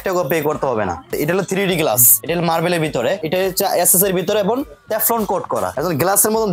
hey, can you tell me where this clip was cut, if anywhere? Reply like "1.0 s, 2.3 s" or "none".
1.1 s, 2.1 s, 3.2 s, 5.7 s